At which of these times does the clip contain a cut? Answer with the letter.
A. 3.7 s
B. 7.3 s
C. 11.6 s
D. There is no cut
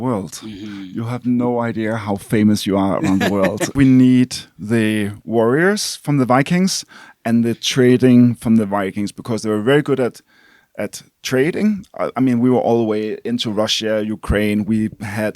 A